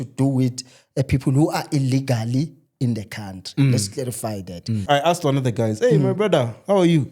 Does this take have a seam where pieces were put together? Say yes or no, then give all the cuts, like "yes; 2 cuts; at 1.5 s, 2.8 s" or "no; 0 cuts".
yes; 1 cut; at 4.8 s